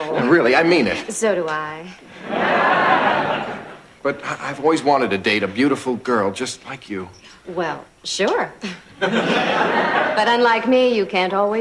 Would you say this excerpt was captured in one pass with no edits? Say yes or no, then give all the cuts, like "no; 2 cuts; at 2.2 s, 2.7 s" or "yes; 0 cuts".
yes; 0 cuts